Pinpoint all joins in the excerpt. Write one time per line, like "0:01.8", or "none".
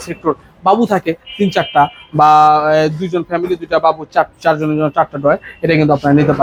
none